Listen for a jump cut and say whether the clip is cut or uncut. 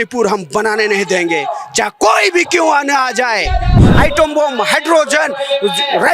cut